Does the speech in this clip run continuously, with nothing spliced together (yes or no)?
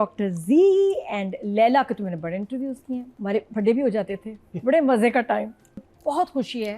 no